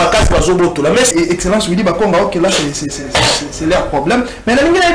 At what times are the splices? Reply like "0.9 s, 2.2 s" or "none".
1.1 s